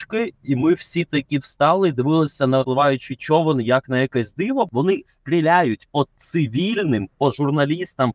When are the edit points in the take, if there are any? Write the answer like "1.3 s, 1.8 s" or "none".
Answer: 2.6 s, 4.7 s